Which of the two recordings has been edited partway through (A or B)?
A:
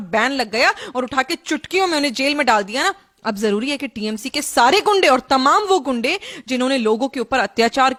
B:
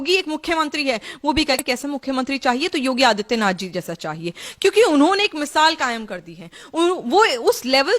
B